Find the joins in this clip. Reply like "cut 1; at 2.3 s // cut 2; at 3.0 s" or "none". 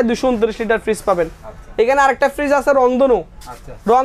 none

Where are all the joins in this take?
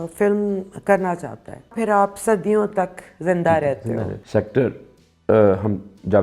cut 1; at 1.7 s // cut 2; at 4.1 s

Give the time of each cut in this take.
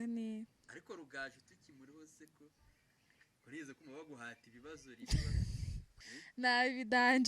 cut 1; at 5.9 s

